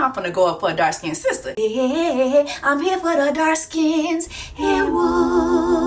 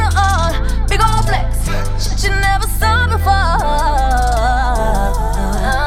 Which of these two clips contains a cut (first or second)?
first